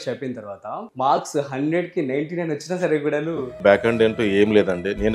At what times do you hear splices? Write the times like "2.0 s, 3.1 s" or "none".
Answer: 0.9 s, 3.5 s